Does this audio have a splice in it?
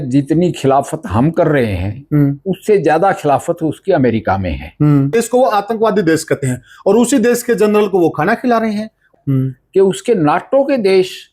yes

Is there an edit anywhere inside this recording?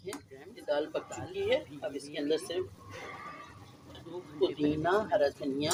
no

